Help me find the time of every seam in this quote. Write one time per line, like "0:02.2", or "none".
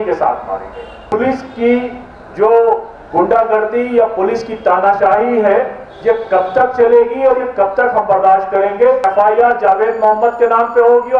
0:01.1
0:09.0